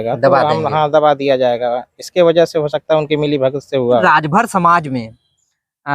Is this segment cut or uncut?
cut